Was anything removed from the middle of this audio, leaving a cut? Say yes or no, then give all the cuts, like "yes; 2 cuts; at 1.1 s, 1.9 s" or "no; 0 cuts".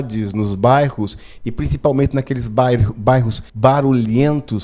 yes; 1 cut; at 3.4 s